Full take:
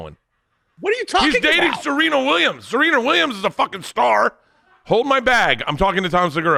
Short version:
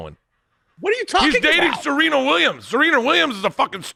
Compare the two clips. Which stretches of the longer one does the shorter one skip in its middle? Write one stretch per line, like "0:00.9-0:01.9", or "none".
none